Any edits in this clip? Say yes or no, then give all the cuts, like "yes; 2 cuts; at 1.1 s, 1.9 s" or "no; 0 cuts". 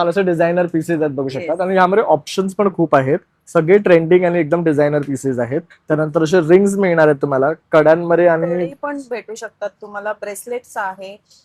no; 0 cuts